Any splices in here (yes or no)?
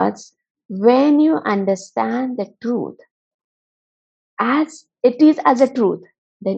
no